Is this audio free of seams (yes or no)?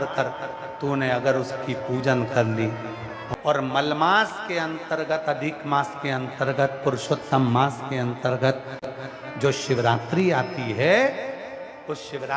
no